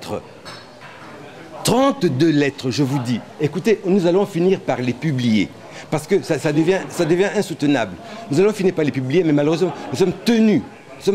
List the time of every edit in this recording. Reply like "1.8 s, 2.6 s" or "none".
none